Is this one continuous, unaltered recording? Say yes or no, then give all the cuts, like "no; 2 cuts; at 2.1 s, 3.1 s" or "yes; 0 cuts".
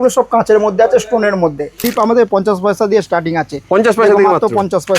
no; 1 cut; at 1.9 s